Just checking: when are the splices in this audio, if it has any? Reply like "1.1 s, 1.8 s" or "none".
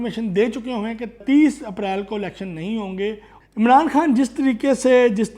1.2 s, 3.3 s